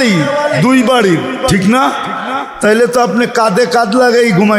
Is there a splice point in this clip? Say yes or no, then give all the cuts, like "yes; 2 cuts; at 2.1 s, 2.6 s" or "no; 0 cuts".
no; 0 cuts